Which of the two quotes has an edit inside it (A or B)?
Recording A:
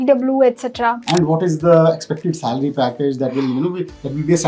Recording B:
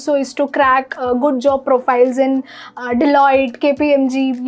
A